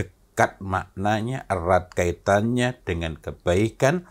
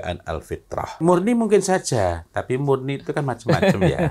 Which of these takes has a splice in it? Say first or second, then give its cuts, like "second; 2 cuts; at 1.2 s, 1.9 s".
second; 1 cut; at 0.9 s